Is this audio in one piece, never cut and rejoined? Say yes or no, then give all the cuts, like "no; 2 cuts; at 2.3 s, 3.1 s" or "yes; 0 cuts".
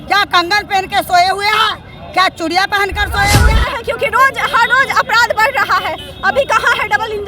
no; 1 cut; at 3.5 s